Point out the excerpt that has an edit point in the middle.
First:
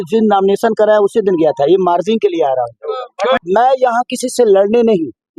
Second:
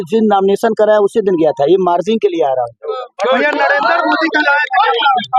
first; 1 cut; at 3.4 s

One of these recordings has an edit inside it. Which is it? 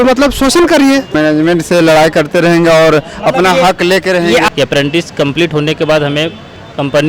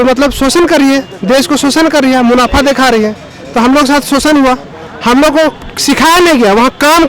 first; 2 cuts; at 1.2 s, 4.5 s

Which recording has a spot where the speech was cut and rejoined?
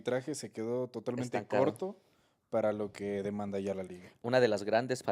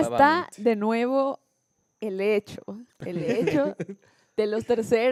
first; 1 cut; at 4.0 s

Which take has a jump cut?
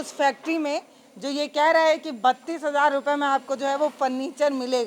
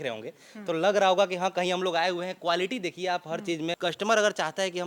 second; 1 cut; at 3.8 s

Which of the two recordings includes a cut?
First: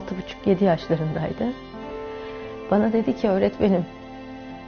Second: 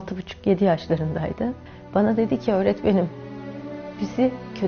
second; 1 cut; at 1.7 s

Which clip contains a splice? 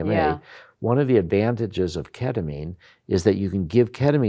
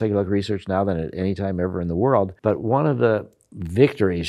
second; 1 cut; at 2.3 s

